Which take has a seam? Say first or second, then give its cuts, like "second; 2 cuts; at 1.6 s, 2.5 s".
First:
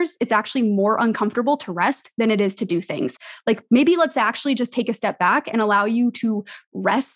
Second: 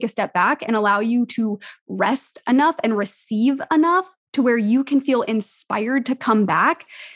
first; 1 cut; at 3.1 s